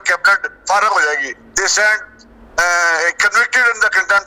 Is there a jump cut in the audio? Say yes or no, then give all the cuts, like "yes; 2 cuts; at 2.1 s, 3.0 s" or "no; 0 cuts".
no; 0 cuts